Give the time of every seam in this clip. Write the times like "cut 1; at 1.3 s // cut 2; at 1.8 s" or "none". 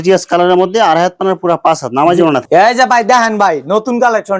cut 1; at 2.4 s